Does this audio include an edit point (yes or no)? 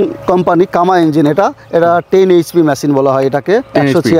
no